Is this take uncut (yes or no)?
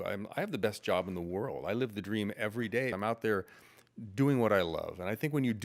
no